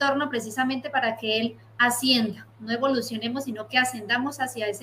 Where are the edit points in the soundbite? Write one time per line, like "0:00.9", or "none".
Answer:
none